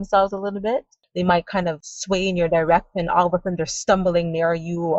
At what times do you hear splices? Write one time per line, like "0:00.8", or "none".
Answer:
0:01.0
0:01.9